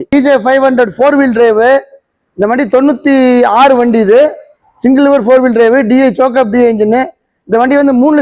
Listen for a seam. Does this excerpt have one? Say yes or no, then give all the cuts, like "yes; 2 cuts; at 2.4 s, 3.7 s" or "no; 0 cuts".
no; 0 cuts